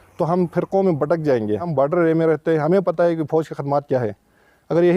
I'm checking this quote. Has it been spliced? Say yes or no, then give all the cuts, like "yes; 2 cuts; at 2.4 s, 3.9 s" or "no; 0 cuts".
yes; 1 cut; at 1.7 s